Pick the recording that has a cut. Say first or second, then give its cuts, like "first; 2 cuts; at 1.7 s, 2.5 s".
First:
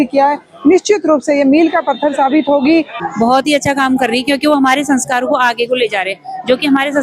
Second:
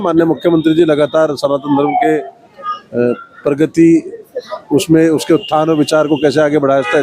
first; 1 cut; at 3.0 s